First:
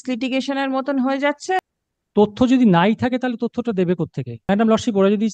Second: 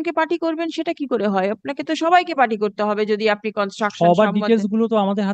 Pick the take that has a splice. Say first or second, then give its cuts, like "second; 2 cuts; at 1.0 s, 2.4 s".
first; 2 cuts; at 1.6 s, 4.5 s